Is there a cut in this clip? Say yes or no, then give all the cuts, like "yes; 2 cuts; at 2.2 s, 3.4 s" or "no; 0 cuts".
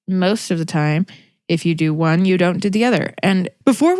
no; 0 cuts